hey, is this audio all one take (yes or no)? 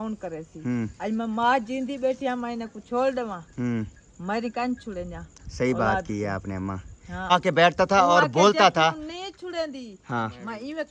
no